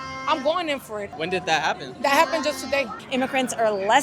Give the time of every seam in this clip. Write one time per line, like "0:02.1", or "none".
0:01.1
0:03.0